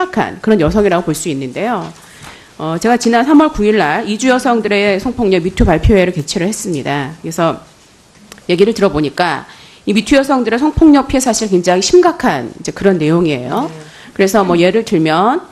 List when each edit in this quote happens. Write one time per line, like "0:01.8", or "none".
0:12.9